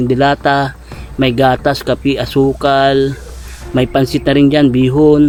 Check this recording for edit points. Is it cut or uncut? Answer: uncut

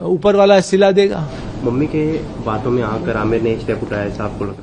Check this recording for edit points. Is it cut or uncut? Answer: uncut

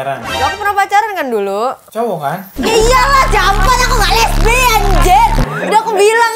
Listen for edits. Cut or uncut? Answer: cut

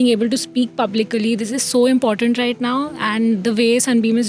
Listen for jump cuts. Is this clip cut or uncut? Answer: uncut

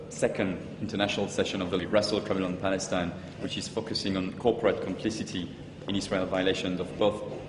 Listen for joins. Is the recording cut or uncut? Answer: cut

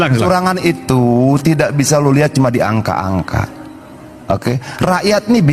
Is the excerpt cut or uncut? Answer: uncut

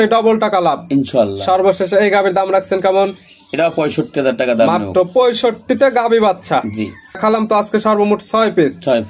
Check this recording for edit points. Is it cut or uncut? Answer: uncut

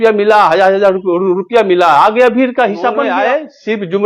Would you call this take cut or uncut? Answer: cut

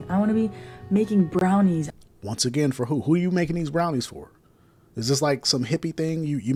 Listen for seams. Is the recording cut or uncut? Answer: uncut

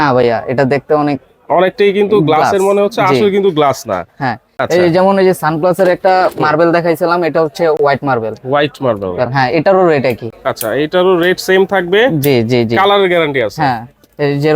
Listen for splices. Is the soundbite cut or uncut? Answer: uncut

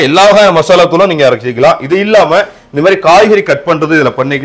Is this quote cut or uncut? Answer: uncut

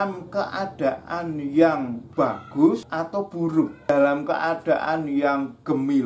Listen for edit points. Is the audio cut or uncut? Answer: cut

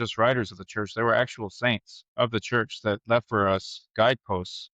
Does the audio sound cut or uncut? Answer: cut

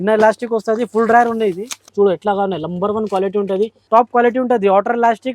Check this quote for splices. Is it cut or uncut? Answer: cut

